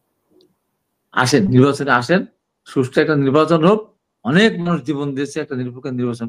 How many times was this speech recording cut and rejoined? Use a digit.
0